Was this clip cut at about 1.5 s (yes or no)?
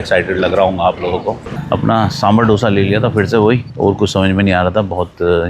yes